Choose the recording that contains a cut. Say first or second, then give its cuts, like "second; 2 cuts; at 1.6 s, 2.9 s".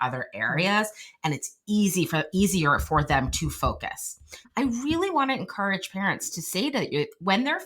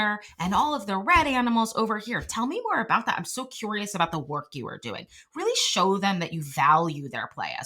first; 1 cut; at 4.4 s